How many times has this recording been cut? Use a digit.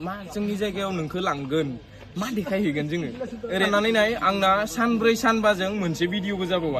1